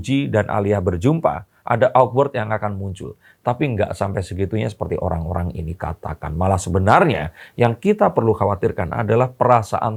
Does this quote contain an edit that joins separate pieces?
no; 0 cuts

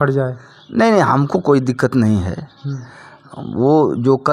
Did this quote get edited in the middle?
no; 0 cuts

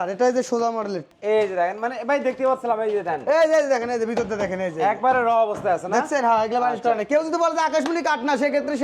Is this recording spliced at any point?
yes; 1 cut; at 1.0 s

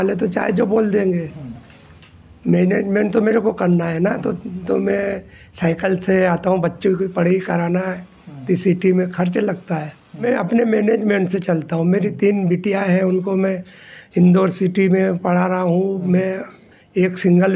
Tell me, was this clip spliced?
no; 0 cuts

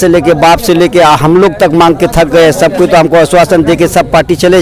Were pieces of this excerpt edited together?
no; 0 cuts

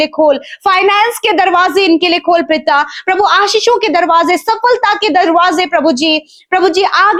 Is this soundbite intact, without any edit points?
yes; 0 cuts

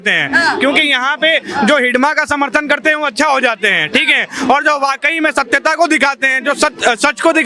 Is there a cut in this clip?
no; 0 cuts

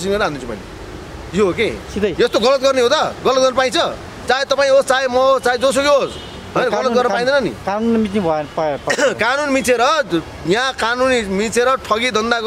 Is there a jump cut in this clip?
no; 0 cuts

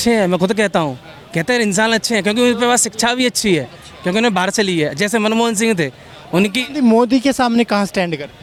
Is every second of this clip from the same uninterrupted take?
yes; 0 cuts

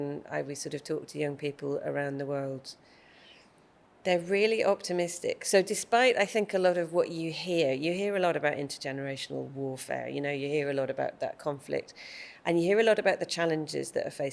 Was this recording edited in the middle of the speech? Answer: no; 0 cuts

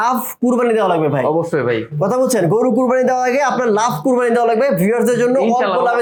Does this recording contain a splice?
no; 0 cuts

